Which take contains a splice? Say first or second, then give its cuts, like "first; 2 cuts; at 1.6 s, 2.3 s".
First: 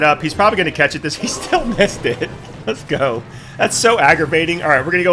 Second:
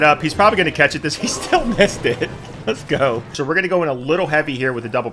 second; 1 cut; at 3.3 s